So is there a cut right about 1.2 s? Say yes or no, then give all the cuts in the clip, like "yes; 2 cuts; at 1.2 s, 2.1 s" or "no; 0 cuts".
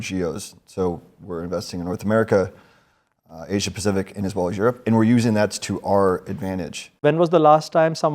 no; 1 cut; at 7.0 s